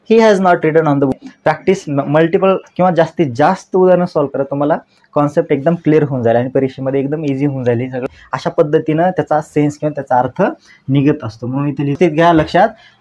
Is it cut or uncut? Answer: cut